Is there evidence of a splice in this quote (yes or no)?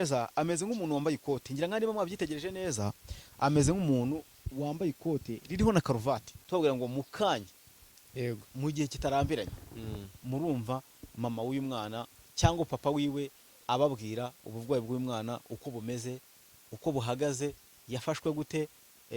yes